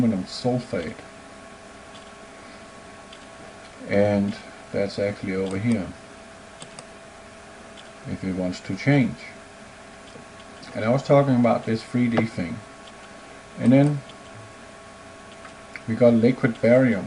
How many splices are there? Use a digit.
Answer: 0